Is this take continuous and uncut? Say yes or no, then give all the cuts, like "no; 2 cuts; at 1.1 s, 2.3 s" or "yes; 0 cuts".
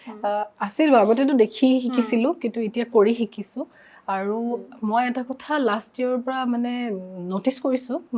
yes; 0 cuts